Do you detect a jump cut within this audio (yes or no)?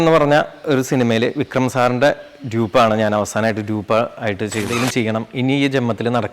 yes